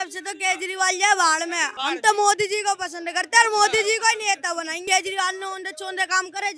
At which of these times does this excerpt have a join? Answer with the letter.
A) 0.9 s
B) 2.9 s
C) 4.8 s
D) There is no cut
C